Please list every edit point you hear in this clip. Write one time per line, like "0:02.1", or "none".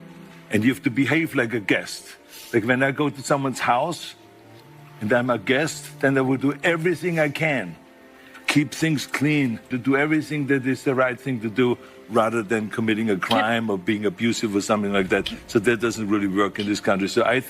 0:09.5